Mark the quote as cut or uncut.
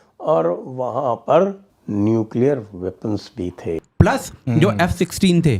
cut